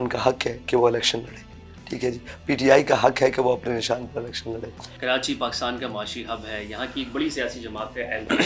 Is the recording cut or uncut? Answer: uncut